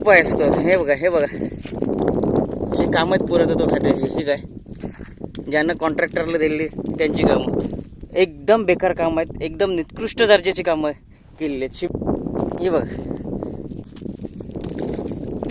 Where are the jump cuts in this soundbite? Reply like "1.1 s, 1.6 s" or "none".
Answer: 11.6 s, 13.8 s